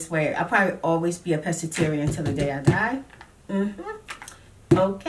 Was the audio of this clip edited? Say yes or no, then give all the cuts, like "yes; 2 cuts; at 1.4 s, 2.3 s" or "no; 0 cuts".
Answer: no; 0 cuts